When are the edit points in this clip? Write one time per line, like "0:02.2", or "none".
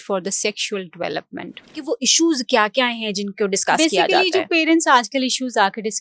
0:01.7